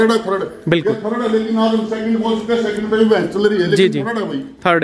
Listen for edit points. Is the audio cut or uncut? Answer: uncut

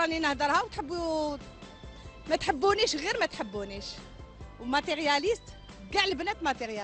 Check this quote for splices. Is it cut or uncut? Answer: uncut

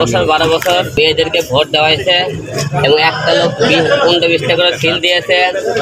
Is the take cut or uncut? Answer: cut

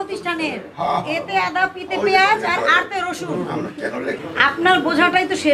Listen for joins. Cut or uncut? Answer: uncut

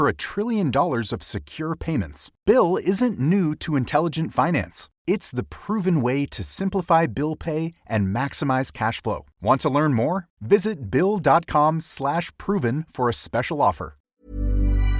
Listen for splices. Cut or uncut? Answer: cut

